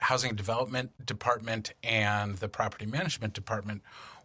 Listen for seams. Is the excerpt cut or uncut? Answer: cut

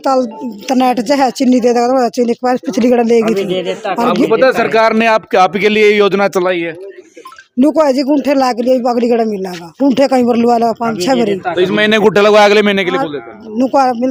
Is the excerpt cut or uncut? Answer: uncut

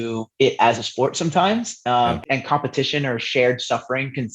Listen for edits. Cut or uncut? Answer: cut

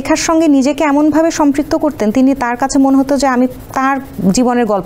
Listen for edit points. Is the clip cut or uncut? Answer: uncut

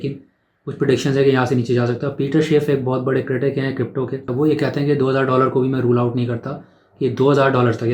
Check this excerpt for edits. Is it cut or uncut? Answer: cut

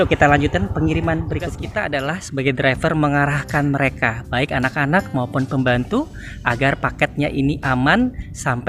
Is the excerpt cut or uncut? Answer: cut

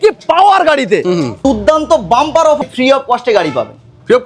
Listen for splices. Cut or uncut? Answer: cut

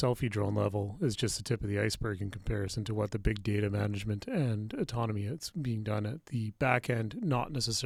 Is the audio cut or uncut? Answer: uncut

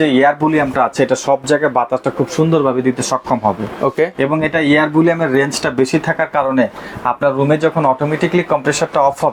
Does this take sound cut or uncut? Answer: uncut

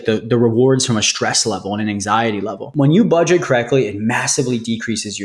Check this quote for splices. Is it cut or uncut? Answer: cut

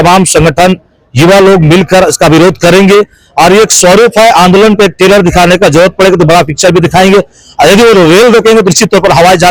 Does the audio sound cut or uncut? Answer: uncut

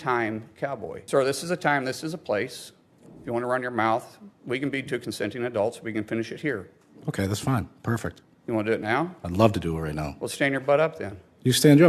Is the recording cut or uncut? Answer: cut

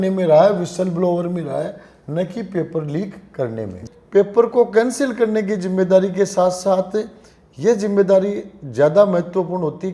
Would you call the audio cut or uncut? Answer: cut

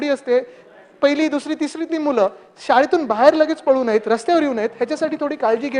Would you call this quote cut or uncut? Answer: uncut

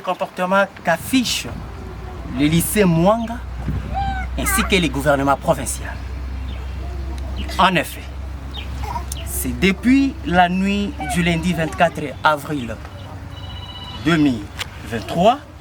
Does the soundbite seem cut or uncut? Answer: uncut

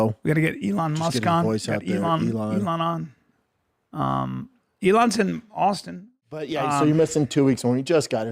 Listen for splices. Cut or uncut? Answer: cut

